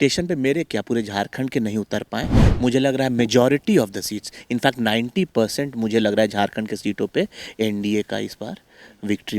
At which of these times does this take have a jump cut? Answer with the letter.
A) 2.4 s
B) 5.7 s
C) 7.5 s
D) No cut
A